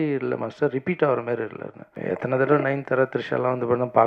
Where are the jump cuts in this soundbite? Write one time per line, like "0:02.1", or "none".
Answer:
0:01.9